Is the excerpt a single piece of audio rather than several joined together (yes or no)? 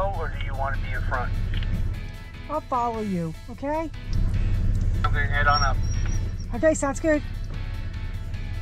yes